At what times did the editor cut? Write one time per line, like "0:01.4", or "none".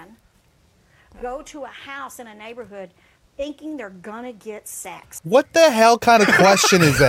none

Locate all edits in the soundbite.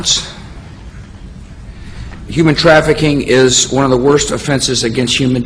none

